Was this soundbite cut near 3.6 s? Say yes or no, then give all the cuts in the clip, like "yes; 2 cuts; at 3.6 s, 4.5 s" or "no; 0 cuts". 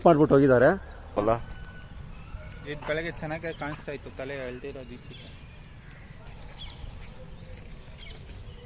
no; 1 cut; at 1.2 s